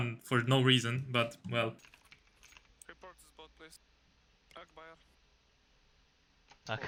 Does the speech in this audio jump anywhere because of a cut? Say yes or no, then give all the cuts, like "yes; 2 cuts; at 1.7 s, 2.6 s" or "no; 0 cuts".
no; 0 cuts